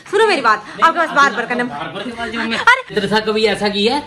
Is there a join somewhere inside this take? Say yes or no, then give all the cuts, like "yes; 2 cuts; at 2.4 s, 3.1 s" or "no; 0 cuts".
yes; 1 cut; at 2.9 s